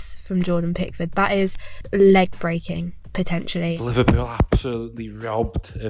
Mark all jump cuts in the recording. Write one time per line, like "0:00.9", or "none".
0:01.7
0:03.8